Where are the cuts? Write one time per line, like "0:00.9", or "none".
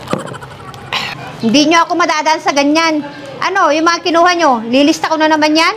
0:01.1